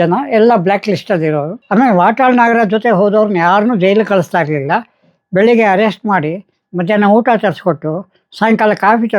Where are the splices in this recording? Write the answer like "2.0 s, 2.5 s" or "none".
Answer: 1.5 s